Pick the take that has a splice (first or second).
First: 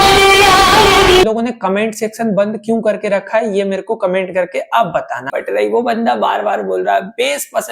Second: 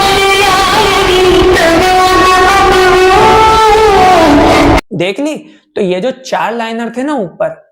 first